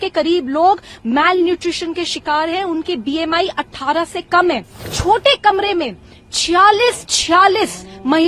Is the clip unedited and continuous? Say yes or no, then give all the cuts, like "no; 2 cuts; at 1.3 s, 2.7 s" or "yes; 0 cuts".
no; 1 cut; at 4.9 s